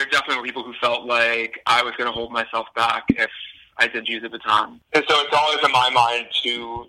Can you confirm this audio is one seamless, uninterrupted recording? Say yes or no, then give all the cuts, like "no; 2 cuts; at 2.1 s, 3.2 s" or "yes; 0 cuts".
no; 1 cut; at 4.8 s